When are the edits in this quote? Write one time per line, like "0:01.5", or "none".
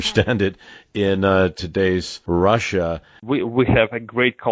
0:02.1
0:03.2